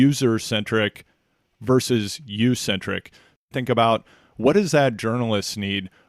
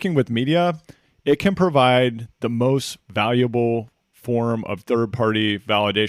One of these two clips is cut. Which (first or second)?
first